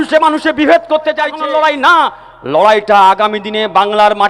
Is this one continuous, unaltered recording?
no; 1 cut; at 1.3 s

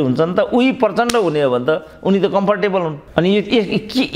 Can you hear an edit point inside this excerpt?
no; 0 cuts

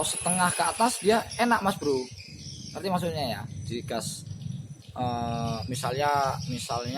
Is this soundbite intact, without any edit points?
yes; 0 cuts

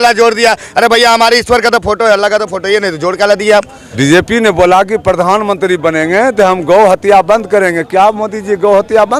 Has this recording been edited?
yes; 1 cut; at 3.8 s

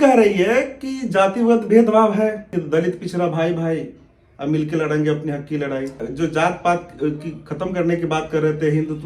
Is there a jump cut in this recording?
yes; 2 cuts; at 2.5 s, 6.0 s

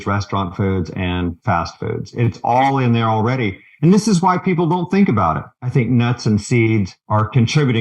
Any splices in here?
yes; 2 cuts; at 5.6 s, 7.0 s

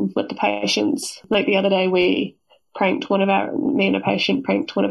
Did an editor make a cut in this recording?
no; 0 cuts

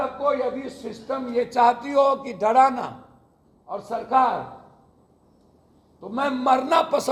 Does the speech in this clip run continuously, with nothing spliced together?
yes; 0 cuts

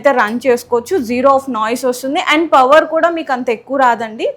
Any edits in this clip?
no; 0 cuts

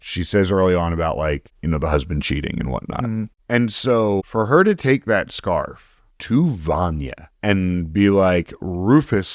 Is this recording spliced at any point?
yes; 3 cuts; at 1.5 s, 3.4 s, 4.3 s

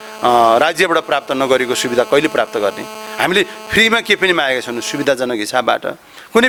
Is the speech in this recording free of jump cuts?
yes; 0 cuts

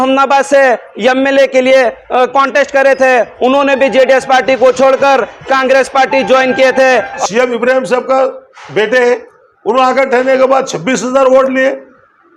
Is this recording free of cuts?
no; 1 cut; at 7.2 s

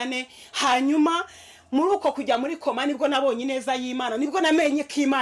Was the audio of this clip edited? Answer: no; 0 cuts

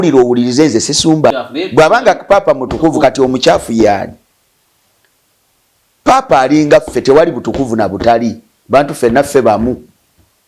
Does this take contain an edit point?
yes; 1 cut; at 1.3 s

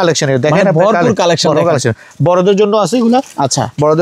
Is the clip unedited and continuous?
yes; 0 cuts

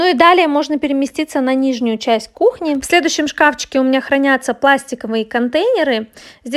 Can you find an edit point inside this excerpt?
no; 0 cuts

